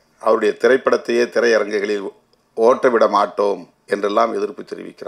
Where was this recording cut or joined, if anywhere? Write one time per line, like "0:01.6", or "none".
0:03.7